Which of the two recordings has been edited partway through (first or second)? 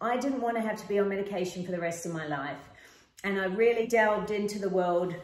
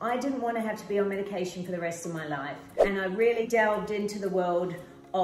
second